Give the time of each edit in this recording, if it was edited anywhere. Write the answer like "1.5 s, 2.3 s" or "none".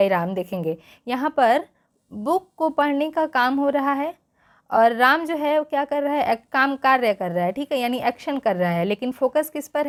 none